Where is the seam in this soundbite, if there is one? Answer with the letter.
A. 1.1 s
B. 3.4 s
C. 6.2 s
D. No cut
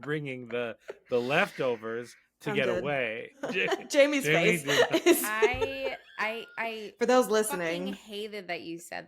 B